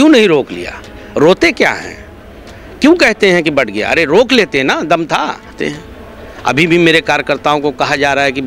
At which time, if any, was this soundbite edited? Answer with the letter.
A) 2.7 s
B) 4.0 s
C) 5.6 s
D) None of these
C